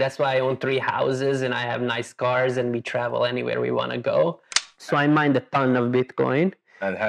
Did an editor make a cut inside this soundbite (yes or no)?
yes